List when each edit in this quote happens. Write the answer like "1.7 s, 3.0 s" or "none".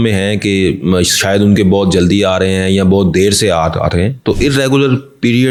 none